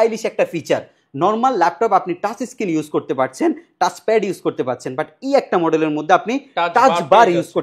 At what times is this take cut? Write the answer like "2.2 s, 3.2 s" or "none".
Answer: none